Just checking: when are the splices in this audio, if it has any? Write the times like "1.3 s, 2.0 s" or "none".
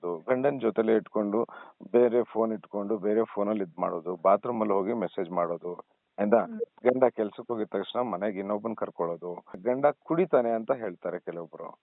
9.6 s